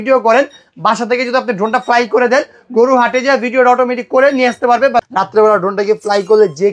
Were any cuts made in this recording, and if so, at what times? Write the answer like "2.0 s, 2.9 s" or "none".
5.1 s